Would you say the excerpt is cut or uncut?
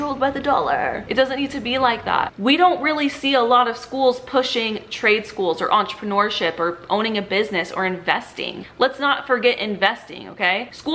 cut